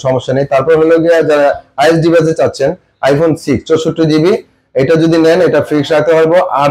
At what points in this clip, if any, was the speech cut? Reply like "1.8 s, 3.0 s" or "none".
none